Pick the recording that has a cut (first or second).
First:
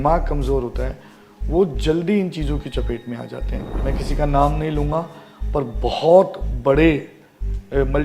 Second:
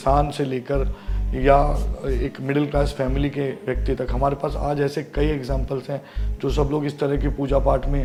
first